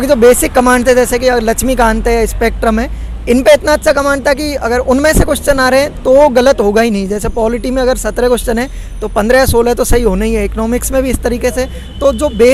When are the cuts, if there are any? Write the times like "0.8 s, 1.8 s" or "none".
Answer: none